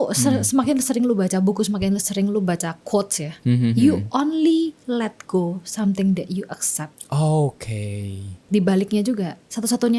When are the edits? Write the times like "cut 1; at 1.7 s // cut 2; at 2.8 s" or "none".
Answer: none